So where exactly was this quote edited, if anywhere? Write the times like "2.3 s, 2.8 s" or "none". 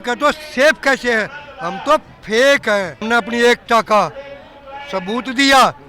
3.0 s